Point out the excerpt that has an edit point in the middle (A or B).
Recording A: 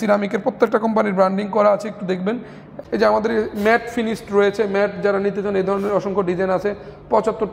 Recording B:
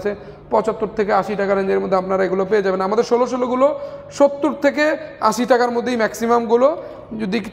A